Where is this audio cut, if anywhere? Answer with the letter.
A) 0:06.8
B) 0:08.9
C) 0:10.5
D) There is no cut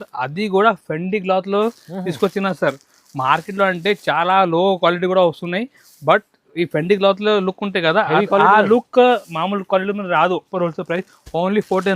C